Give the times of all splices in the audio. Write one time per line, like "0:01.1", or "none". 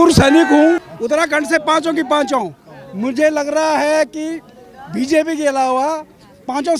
0:00.9